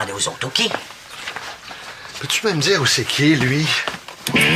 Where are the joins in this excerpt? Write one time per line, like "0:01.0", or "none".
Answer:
none